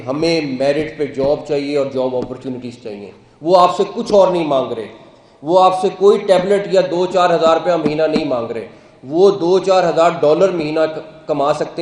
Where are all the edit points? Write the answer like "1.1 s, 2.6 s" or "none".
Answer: none